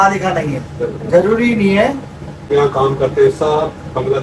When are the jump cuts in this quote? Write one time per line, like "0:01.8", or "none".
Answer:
0:02.5